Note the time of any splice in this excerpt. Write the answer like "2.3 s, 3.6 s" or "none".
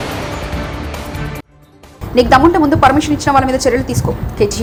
none